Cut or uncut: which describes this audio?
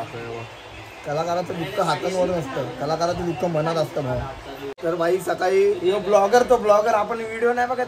cut